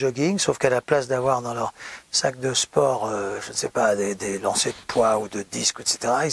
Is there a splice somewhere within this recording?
no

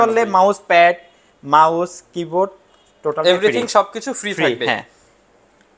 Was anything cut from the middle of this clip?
no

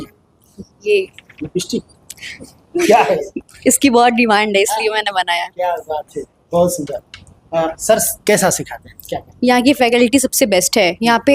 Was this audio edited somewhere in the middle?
no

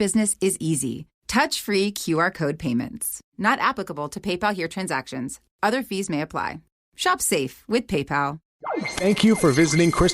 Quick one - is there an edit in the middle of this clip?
yes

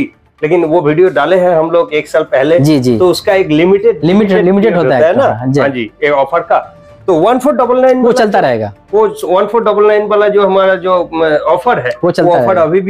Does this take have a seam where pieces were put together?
no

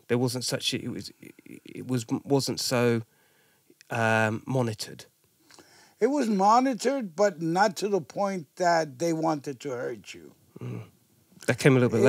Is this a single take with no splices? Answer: yes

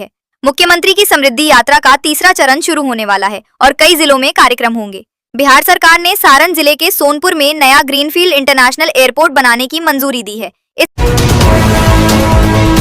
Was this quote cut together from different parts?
yes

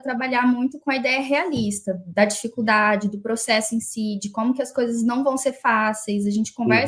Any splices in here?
no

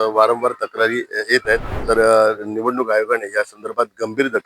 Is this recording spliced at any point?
yes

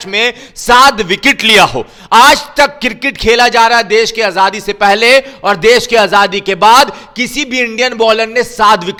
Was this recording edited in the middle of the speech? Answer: no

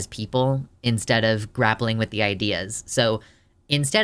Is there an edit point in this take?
no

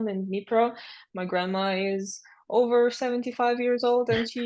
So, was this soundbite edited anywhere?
no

